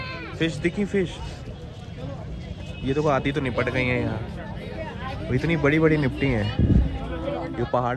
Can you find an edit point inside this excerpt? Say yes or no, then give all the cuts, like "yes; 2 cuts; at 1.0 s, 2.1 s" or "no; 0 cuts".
no; 0 cuts